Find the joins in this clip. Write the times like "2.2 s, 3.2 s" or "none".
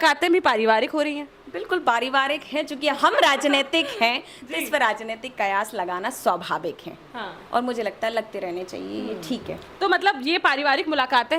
none

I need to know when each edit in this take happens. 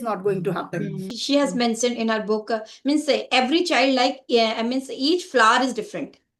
1.1 s

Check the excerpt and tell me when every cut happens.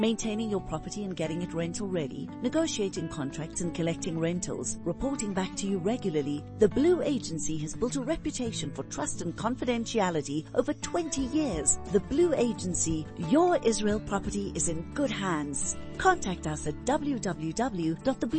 none

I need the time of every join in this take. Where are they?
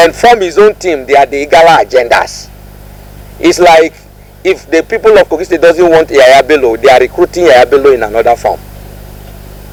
none

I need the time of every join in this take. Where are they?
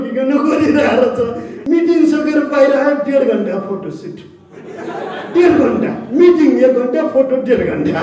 1.5 s

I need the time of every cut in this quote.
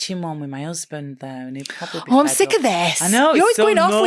none

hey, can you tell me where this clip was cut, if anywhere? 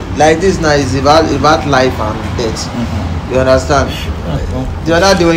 none

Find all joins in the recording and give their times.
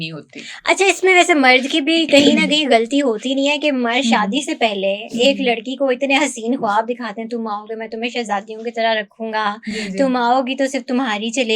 none

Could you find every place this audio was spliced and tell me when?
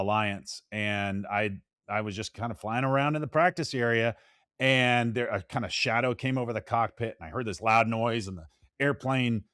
none

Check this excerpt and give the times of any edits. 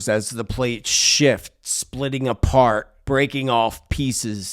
2.9 s

